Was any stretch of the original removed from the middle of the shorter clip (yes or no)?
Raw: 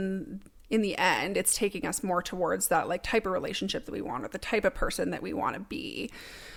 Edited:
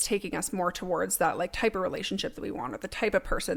no